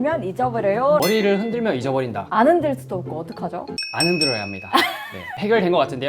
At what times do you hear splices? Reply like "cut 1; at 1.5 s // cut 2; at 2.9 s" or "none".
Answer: cut 1; at 1.0 s